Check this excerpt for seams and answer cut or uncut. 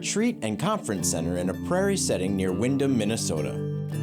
uncut